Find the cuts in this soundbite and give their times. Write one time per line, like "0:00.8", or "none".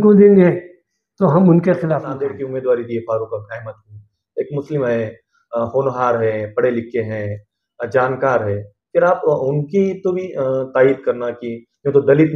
0:02.4